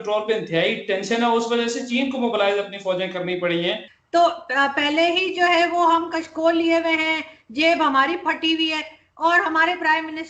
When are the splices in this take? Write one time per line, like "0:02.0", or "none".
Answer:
0:03.9